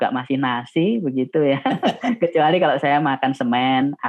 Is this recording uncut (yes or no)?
yes